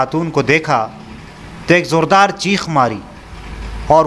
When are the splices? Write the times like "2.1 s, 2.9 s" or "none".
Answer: none